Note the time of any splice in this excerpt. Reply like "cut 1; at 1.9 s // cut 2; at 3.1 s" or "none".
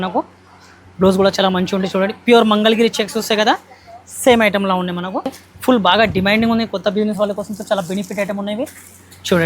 cut 1; at 5.4 s